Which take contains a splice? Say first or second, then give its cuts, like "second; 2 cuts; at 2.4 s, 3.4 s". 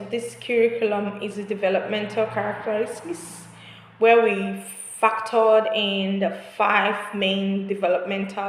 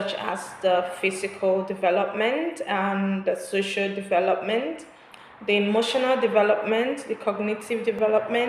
second; 1 cut; at 0.9 s